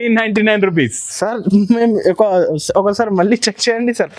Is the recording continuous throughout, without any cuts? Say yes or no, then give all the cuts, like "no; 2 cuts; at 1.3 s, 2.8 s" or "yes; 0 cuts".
yes; 0 cuts